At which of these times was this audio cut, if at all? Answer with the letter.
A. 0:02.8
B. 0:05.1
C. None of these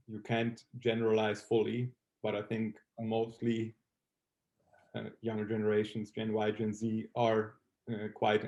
C